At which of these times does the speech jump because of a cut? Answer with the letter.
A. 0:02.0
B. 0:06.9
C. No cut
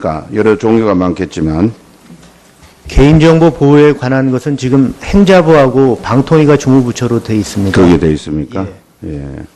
C